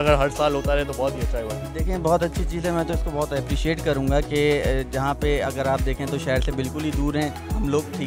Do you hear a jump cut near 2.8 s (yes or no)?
no